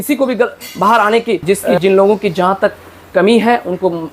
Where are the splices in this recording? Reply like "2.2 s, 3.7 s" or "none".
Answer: 1.6 s